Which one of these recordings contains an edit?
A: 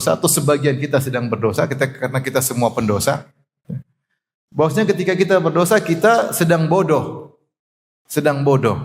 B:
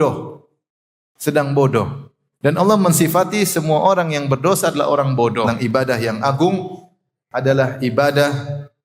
B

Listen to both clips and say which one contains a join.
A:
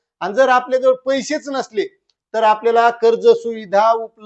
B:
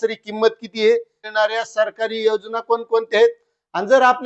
B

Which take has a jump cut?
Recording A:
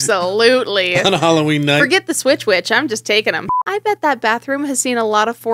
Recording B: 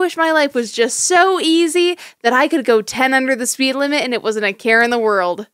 A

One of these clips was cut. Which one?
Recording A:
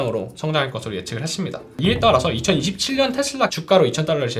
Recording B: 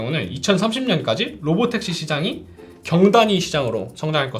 A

